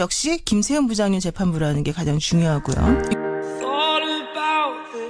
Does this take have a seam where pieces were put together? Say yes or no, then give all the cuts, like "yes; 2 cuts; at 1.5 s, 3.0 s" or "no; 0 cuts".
yes; 1 cut; at 2.6 s